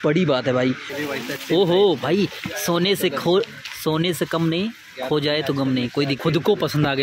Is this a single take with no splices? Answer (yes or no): no